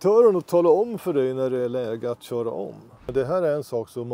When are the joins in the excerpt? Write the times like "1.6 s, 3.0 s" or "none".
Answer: 3.0 s